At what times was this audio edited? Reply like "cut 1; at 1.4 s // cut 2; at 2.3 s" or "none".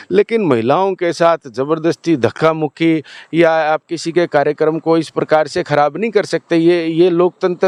none